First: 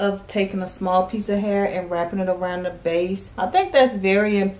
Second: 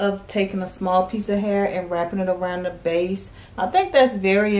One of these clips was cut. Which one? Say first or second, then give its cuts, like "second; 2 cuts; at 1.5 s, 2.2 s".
first; 1 cut; at 3.2 s